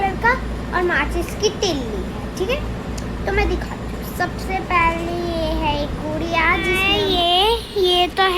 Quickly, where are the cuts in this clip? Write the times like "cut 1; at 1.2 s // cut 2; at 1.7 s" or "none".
cut 1; at 6.9 s